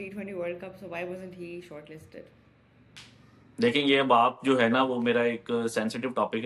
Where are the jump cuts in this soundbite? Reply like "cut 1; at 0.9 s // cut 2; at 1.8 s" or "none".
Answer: none